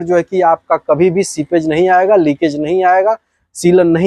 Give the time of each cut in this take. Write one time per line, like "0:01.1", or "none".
none

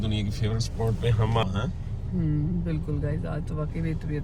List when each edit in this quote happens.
0:01.4

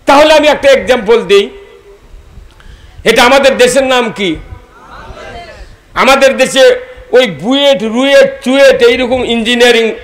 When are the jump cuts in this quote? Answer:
none

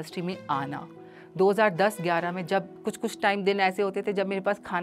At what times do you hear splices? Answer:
0:02.7

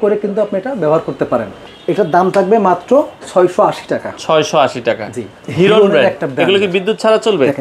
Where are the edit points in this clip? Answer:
0:01.5
0:03.2
0:05.4

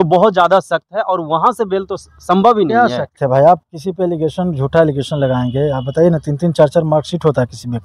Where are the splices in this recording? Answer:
none

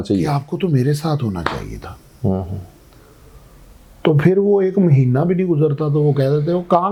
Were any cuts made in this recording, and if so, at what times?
none

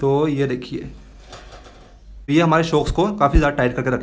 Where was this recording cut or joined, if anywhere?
0:02.3

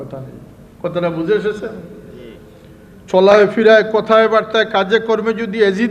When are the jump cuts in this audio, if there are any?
none

